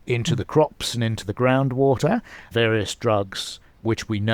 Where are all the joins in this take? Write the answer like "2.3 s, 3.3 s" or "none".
2.5 s